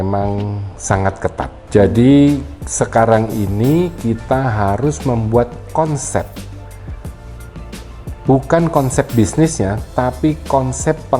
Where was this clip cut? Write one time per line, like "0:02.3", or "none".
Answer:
0:01.6